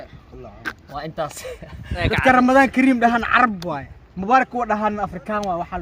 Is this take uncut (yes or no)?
no